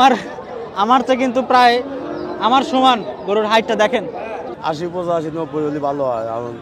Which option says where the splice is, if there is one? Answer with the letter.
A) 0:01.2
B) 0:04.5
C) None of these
B